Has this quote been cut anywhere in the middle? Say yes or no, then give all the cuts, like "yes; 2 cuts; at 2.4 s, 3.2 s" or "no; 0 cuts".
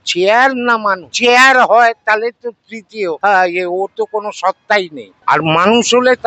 yes; 3 cuts; at 1.1 s, 3.2 s, 5.0 s